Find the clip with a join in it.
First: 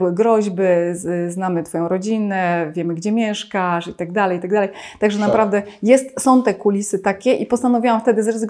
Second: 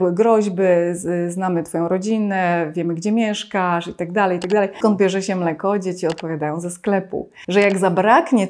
second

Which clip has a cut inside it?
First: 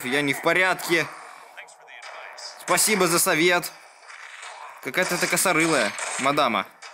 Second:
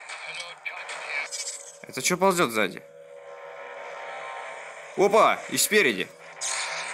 second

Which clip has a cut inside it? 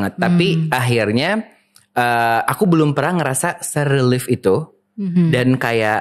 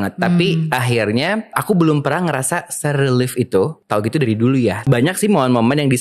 second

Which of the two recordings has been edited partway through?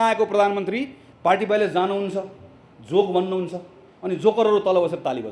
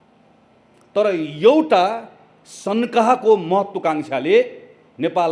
first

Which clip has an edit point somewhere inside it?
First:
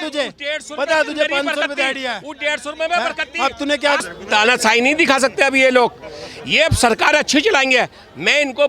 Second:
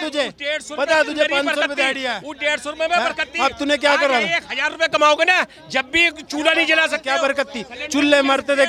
first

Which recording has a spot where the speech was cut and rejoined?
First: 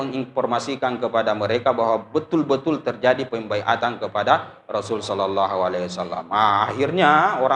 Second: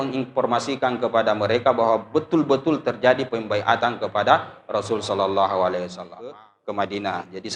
second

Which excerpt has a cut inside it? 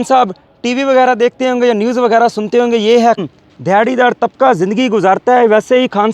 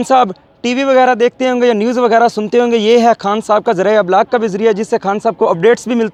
first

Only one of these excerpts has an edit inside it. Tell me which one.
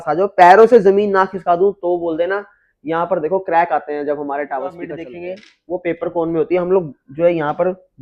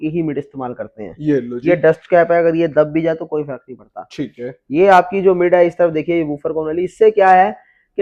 first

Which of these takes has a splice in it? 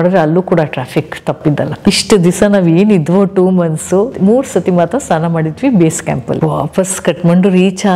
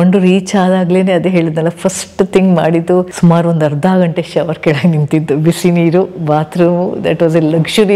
first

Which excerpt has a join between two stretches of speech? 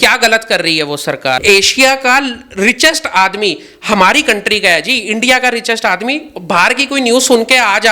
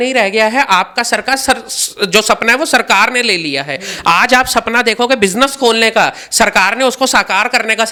first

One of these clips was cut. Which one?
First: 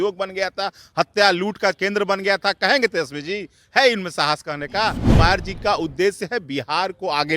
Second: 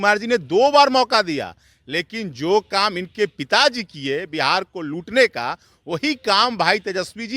first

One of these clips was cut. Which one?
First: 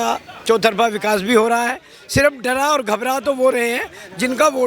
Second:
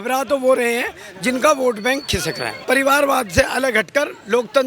second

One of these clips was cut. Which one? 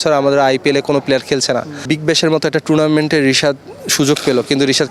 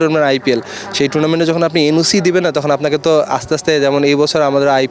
first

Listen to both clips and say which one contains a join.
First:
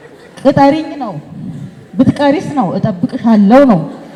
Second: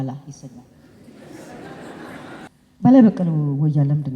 second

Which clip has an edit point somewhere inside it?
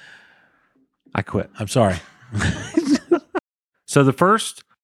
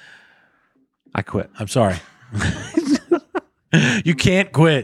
first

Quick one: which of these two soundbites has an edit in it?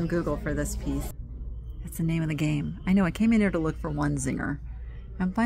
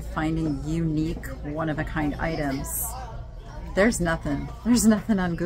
first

